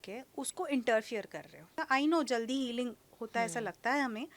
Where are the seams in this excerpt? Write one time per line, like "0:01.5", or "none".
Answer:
0:01.8